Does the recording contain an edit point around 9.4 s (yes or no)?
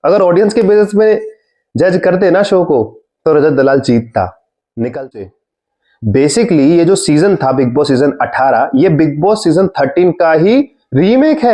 no